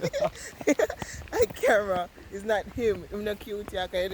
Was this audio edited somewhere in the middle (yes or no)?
no